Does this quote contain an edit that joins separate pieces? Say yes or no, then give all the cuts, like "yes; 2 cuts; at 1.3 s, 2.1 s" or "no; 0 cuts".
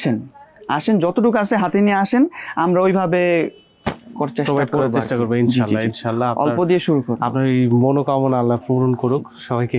no; 0 cuts